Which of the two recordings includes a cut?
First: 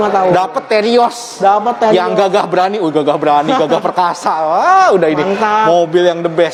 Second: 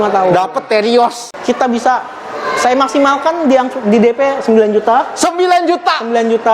second; 1 cut; at 1.2 s

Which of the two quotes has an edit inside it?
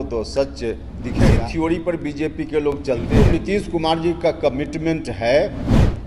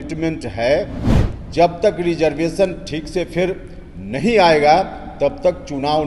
first; 2 cuts; at 1.2 s, 3.1 s

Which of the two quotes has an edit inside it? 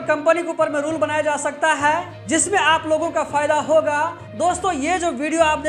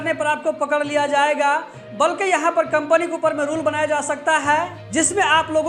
first; 1 cut; at 4.2 s

